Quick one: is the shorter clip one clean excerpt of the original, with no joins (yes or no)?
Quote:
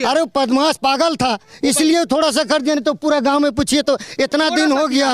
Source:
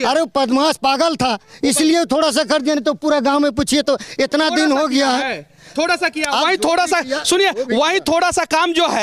yes